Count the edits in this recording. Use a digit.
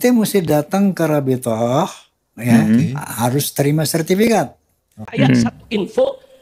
1